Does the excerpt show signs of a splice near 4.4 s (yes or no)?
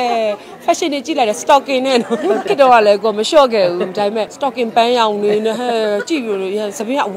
yes